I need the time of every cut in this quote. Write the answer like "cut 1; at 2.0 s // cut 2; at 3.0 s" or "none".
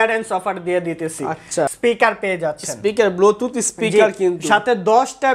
cut 1; at 1.7 s